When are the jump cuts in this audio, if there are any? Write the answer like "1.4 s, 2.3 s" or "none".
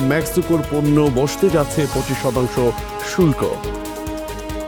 none